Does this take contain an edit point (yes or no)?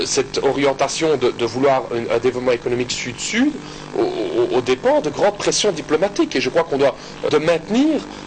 yes